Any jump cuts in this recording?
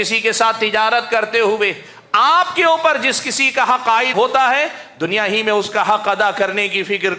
yes; 1 cut; at 4.1 s

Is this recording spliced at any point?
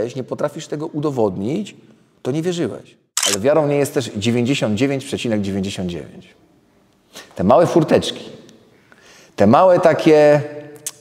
yes; 1 cut; at 3.4 s

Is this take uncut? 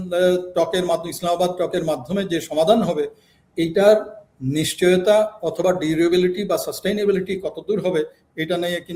yes; 0 cuts

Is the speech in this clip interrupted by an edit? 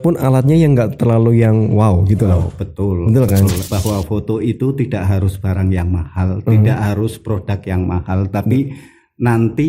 yes; 1 cut; at 3.7 s

